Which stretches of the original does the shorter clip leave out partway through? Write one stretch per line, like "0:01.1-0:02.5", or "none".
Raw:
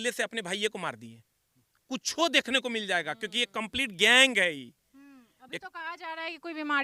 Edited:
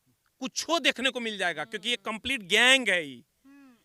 none